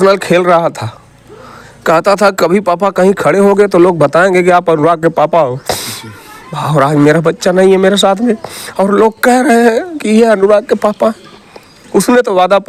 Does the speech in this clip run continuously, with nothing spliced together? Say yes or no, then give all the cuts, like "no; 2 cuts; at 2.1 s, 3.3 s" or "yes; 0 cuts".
yes; 0 cuts